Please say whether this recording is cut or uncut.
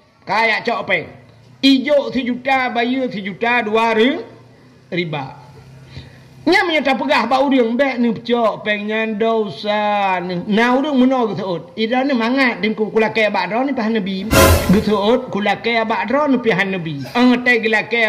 cut